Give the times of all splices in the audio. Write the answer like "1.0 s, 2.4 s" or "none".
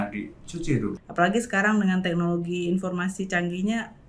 0.9 s